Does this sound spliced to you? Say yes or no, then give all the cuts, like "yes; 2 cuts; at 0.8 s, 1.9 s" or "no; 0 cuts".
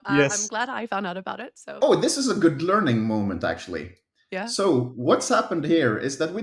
yes; 1 cut; at 1.7 s